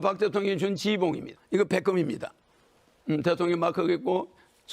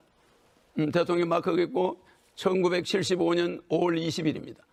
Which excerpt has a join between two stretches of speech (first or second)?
first